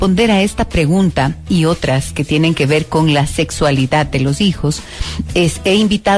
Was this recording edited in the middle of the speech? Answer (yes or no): yes